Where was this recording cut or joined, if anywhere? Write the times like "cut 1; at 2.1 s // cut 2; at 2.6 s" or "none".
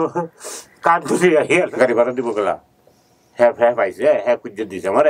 cut 1; at 1.7 s